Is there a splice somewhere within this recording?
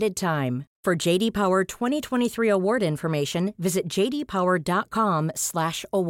no; 0 cuts

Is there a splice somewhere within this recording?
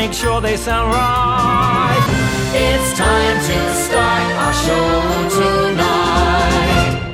yes; 1 cut; at 2.1 s

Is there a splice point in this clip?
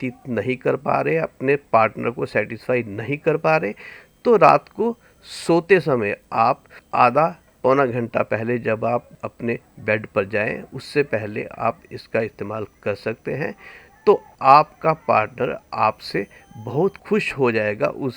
yes; 4 cuts; at 6.7 s, 7.5 s, 9.2 s, 14.3 s

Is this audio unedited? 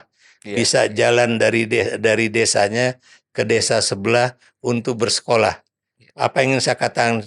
yes; 0 cuts

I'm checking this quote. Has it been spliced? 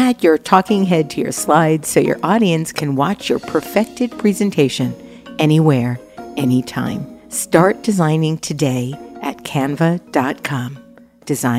no; 0 cuts

